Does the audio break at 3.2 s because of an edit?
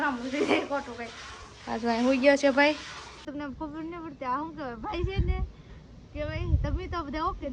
yes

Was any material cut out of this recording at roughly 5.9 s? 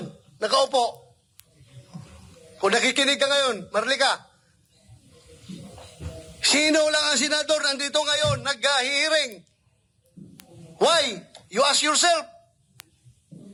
no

